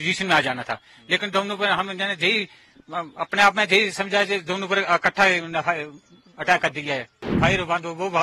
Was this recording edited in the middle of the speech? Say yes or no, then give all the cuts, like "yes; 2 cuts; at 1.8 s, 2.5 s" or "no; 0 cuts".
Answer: yes; 1 cut; at 7.2 s